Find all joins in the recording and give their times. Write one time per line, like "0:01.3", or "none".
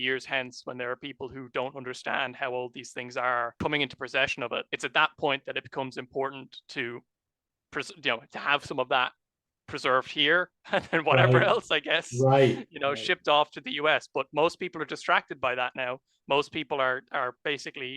0:03.5
0:04.7